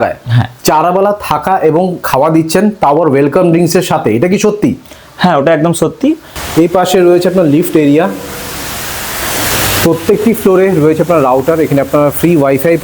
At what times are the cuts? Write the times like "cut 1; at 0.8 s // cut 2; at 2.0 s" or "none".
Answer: cut 1; at 6.3 s